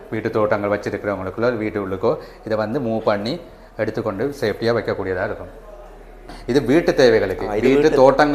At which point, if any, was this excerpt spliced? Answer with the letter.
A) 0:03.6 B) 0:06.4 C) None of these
B